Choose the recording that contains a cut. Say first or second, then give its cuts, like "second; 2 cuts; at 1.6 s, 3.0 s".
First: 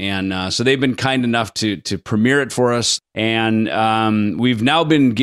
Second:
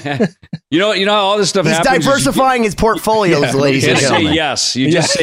first; 1 cut; at 3.0 s